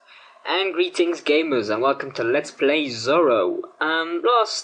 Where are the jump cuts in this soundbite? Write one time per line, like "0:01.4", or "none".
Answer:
none